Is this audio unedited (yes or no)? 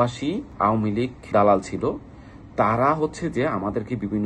yes